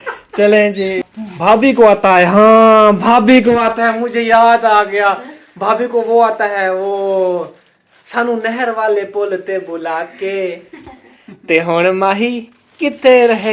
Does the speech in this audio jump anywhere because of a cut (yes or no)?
yes